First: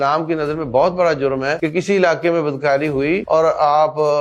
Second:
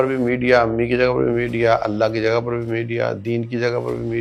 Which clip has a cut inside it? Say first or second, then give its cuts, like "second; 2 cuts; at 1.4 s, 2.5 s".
first; 2 cuts; at 1.6 s, 3.2 s